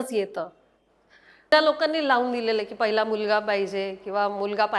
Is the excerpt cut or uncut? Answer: cut